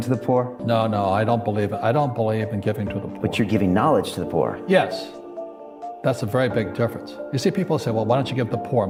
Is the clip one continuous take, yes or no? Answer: yes